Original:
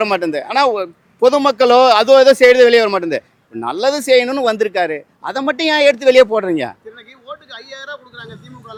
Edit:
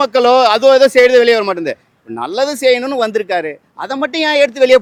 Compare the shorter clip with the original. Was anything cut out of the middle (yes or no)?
no